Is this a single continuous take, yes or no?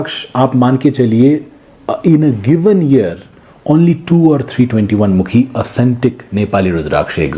yes